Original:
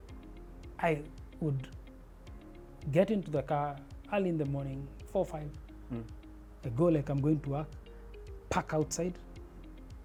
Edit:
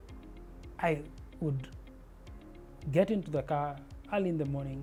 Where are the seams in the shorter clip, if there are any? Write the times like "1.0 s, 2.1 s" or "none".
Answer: none

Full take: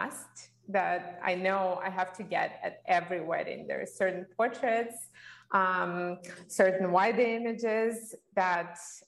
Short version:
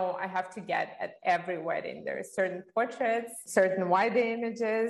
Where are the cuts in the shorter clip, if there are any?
3.4 s

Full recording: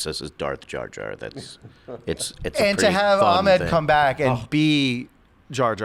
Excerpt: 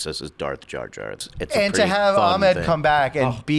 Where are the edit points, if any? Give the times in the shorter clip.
1.2 s

